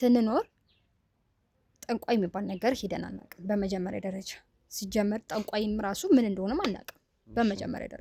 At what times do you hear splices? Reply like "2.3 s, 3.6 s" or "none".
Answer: none